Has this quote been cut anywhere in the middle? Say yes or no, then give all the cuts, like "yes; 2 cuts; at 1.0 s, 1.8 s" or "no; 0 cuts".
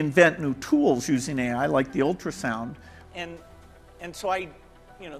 yes; 1 cut; at 2.9 s